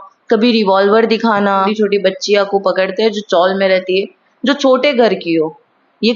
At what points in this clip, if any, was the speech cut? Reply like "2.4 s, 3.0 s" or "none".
1.7 s